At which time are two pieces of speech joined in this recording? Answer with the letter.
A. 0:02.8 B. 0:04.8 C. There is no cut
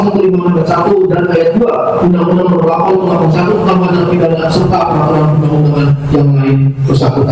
C